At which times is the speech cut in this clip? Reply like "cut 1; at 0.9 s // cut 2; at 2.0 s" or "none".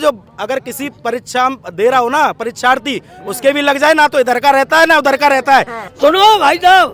cut 1; at 5.8 s